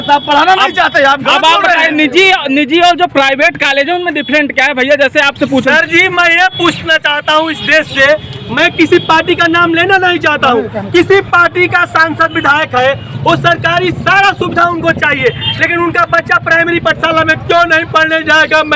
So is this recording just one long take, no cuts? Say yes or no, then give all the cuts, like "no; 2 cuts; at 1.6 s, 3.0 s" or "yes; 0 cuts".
yes; 0 cuts